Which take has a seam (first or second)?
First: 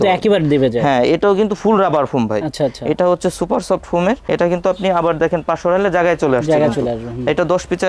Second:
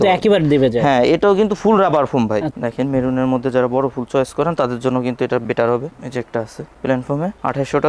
second